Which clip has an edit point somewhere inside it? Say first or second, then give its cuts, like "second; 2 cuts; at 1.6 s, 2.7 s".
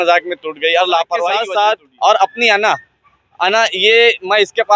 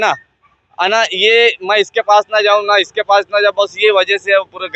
first; 1 cut; at 1.4 s